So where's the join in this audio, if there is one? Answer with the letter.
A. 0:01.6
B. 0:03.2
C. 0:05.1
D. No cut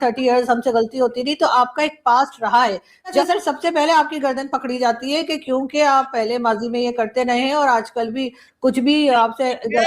B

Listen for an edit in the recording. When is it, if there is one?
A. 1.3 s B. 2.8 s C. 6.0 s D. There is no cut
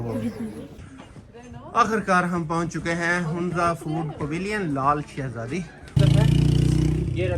C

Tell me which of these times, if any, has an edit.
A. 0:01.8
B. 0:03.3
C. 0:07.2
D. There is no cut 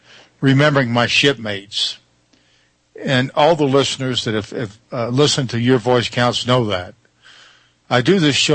B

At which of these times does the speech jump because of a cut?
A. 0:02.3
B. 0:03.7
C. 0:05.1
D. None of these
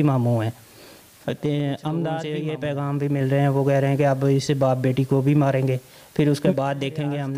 A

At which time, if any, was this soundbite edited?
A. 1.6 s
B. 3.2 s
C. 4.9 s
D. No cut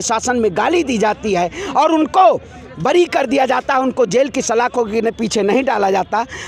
D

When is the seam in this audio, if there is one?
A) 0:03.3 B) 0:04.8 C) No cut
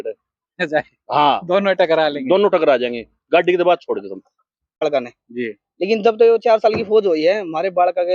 B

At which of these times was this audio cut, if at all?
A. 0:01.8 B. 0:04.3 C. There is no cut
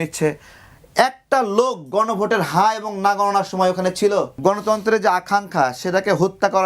B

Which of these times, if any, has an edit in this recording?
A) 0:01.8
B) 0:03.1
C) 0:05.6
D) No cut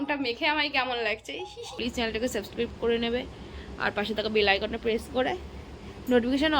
A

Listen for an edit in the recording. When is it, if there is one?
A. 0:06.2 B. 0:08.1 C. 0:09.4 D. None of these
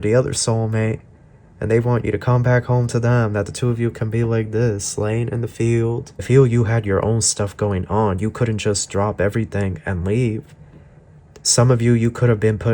A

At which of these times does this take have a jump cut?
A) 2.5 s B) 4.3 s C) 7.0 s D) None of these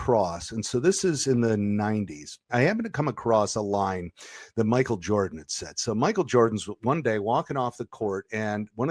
A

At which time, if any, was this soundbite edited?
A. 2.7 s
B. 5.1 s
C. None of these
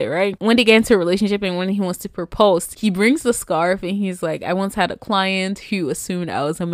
A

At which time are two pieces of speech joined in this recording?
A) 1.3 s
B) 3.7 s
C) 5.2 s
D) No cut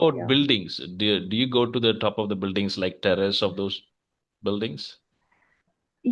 D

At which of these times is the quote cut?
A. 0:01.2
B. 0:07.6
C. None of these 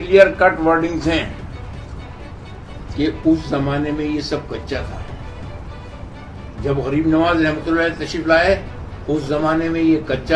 C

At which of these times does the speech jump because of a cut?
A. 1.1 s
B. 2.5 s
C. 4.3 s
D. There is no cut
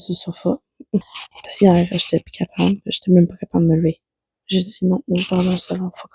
A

